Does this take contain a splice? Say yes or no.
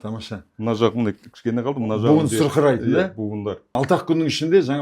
yes